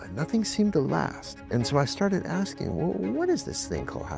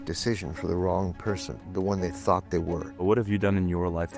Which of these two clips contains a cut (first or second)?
second